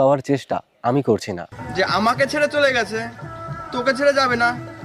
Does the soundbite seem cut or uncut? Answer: cut